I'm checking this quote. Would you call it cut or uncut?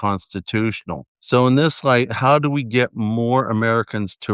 uncut